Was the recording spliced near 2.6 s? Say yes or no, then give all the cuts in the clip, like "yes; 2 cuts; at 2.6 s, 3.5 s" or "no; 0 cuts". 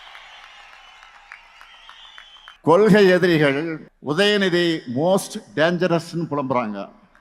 yes; 2 cuts; at 2.6 s, 3.9 s